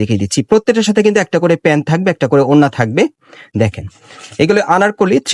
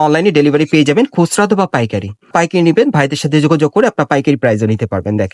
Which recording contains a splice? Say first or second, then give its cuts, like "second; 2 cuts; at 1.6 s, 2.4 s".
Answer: second; 1 cut; at 2.3 s